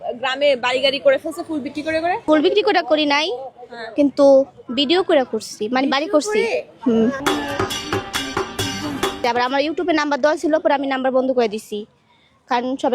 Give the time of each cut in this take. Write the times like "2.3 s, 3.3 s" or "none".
2.2 s, 9.2 s